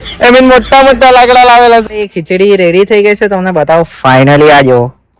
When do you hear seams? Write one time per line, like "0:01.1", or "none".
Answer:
0:01.8